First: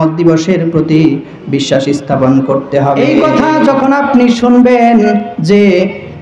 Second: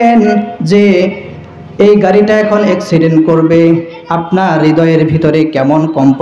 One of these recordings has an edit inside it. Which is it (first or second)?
first